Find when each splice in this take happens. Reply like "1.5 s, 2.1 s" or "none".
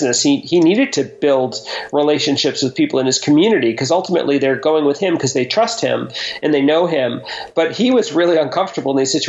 none